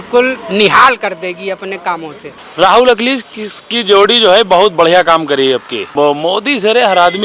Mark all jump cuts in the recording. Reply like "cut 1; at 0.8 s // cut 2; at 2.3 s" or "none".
cut 1; at 2.3 s // cut 2; at 5.9 s